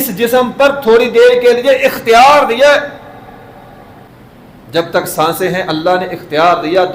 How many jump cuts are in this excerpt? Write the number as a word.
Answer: one